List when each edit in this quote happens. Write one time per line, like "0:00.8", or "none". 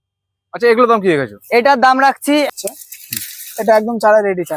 0:02.5

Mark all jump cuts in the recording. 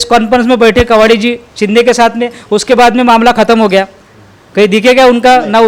none

